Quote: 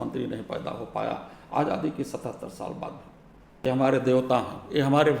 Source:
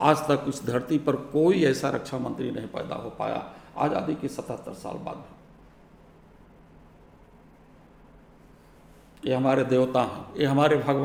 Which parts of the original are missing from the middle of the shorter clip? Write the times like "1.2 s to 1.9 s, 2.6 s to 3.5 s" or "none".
5.9 s to 9.3 s